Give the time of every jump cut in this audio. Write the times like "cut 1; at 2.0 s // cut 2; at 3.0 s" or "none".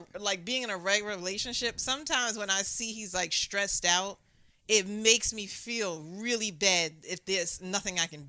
none